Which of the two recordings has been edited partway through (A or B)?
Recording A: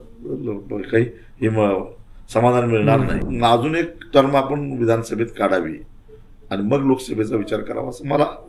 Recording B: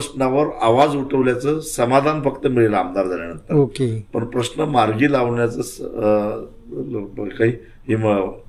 A